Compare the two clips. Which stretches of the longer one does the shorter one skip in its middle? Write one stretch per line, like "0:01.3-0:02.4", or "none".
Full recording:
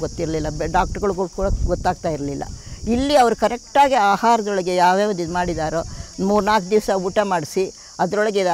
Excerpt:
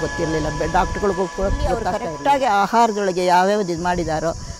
0:02.0-0:03.5